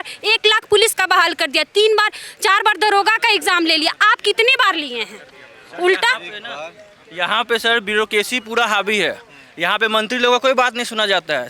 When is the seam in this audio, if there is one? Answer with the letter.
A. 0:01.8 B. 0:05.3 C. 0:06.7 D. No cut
D